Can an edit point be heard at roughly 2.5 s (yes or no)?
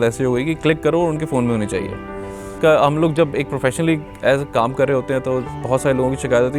yes